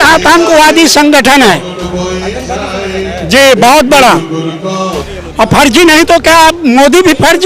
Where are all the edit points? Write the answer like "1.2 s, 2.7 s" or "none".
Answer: 5.0 s